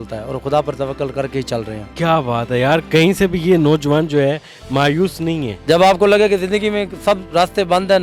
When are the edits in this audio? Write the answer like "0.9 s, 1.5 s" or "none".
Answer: 1.8 s, 5.6 s